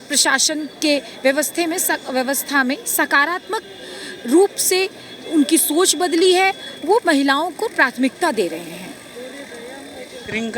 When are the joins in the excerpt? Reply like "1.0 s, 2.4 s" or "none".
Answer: none